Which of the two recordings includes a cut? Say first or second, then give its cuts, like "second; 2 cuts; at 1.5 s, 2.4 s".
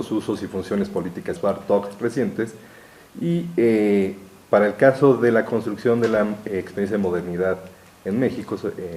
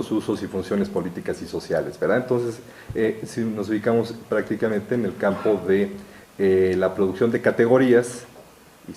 second; 1 cut; at 1.4 s